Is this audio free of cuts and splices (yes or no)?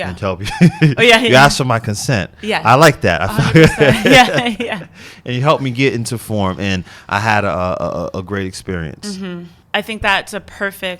no